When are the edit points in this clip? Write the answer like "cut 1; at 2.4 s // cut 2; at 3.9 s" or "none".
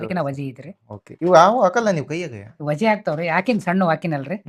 none